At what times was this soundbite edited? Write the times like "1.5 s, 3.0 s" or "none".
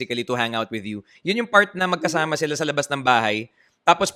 none